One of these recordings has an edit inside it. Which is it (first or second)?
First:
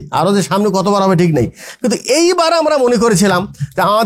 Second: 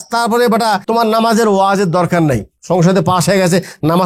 second